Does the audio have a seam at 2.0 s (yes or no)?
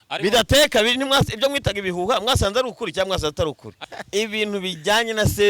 no